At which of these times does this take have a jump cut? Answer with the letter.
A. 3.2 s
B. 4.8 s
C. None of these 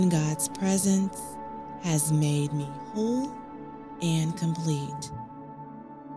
B